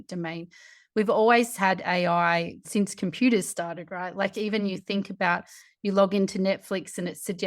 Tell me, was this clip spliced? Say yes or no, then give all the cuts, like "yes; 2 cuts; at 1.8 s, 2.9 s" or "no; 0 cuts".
yes; 1 cut; at 2.6 s